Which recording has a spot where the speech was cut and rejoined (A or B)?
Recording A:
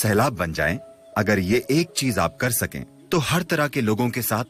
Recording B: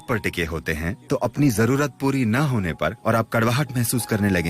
B